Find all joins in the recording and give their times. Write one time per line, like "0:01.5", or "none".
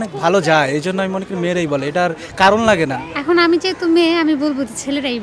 0:03.1